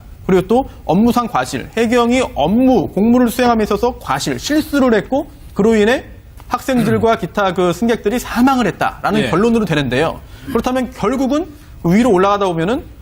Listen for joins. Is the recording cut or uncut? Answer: cut